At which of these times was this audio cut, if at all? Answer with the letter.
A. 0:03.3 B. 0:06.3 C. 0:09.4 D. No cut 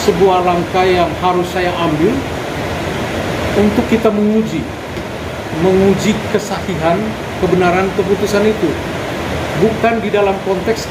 D